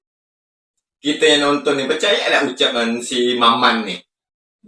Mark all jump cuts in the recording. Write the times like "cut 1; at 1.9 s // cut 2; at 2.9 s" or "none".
none